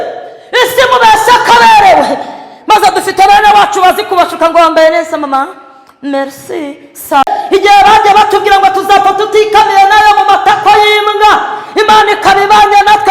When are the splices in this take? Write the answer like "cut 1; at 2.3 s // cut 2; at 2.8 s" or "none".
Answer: cut 1; at 7.4 s

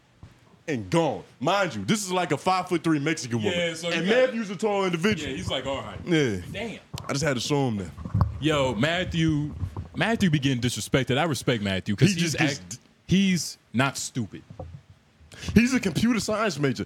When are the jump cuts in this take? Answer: none

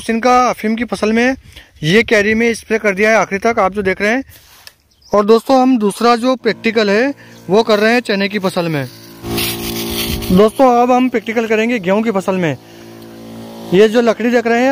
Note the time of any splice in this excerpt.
cut 1; at 4.4 s // cut 2; at 9.3 s

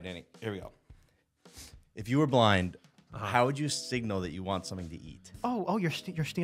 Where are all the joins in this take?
cut 1; at 5.3 s

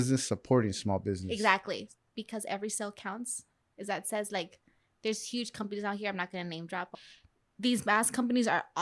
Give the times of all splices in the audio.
cut 1; at 1.9 s // cut 2; at 6.9 s

